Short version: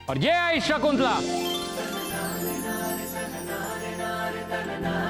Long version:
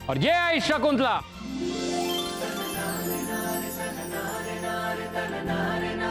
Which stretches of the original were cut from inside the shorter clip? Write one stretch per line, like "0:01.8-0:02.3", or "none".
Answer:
0:01.2-0:01.8